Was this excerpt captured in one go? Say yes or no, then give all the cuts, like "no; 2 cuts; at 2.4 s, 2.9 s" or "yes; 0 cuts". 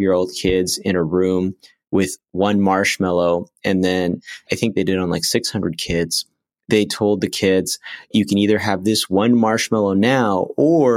no; 2 cuts; at 4.5 s, 8.1 s